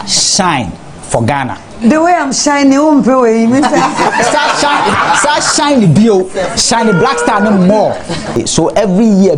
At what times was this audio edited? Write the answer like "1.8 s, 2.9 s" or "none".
8.4 s